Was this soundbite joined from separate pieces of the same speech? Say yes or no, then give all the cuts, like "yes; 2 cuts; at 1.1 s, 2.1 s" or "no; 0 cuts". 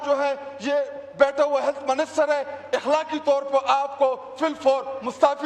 no; 0 cuts